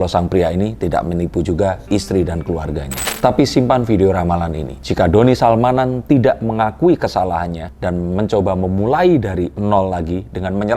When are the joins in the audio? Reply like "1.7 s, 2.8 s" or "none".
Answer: 3.0 s, 7.8 s